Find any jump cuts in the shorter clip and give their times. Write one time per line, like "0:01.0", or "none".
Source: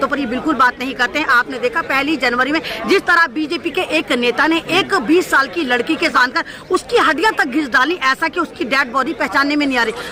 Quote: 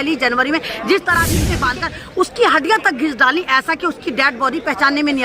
0:01.6